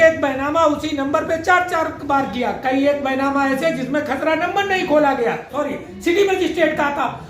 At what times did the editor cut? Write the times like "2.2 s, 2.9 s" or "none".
5.5 s